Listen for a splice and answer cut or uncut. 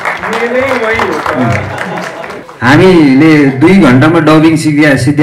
cut